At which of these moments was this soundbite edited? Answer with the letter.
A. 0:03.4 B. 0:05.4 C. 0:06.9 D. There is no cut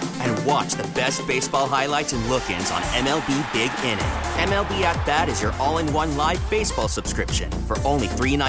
D